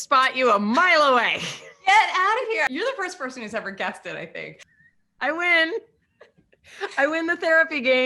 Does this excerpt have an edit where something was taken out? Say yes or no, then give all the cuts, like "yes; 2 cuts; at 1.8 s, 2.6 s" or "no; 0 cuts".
yes; 2 cuts; at 2.7 s, 4.6 s